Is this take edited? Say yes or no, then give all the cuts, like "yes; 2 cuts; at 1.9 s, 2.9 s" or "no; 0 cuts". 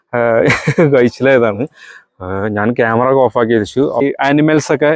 yes; 1 cut; at 4.0 s